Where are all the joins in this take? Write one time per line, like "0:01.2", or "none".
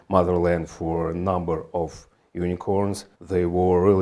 0:03.1